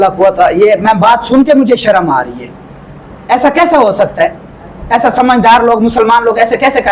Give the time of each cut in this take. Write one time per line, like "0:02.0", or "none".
none